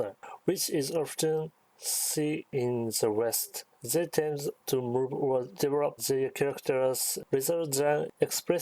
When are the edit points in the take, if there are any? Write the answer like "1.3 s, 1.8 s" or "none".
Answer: 2.5 s, 3.5 s, 4.6 s, 5.7 s

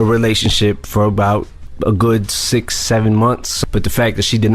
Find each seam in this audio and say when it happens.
1.6 s, 3.5 s

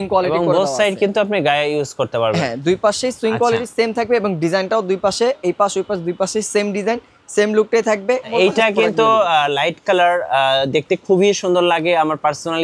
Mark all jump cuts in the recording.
8.3 s

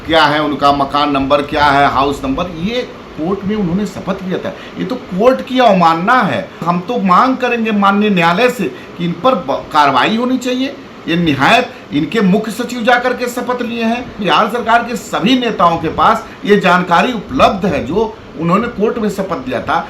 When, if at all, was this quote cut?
6.6 s, 14.2 s

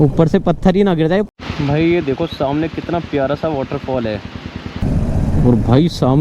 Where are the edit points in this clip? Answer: 1.3 s, 4.8 s

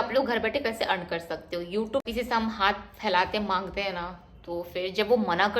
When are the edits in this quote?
2.1 s

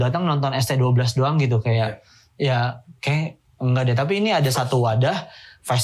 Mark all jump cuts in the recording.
none

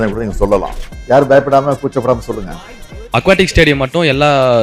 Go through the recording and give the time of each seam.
2.9 s

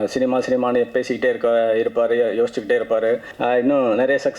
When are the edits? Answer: 3.3 s

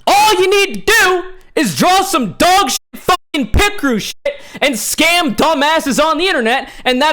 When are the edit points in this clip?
none

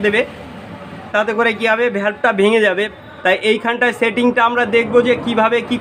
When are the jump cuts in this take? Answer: 2.9 s

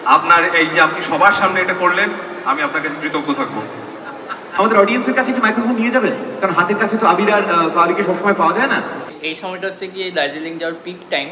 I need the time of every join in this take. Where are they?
4.4 s, 9.0 s

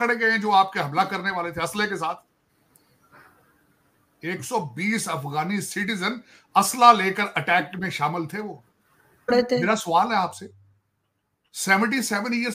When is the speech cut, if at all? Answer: 9.3 s

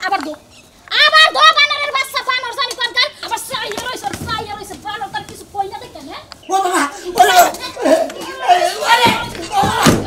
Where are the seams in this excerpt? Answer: 3.2 s, 6.4 s

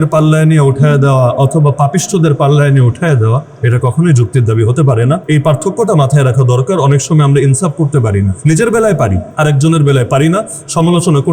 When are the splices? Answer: 5.2 s, 8.3 s, 9.2 s

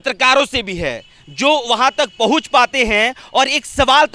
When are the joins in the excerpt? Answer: none

